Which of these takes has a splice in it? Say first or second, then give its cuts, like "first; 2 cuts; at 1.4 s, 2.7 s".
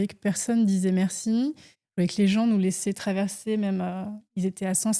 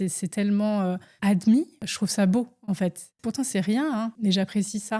second; 4 cuts; at 1.1 s, 1.8 s, 3.1 s, 4.1 s